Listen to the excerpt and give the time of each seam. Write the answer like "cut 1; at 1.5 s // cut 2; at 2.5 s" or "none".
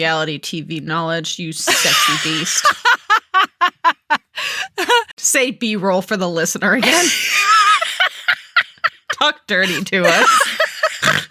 cut 1; at 5.2 s